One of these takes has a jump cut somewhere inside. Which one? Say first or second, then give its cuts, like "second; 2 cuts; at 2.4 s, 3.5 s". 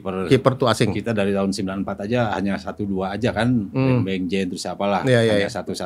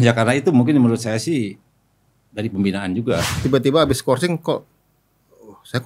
second; 1 cut; at 3.3 s